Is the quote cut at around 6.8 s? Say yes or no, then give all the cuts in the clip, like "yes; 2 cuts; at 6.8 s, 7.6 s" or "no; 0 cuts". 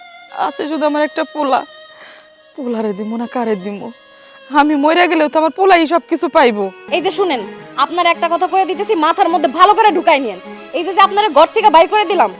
yes; 1 cut; at 6.8 s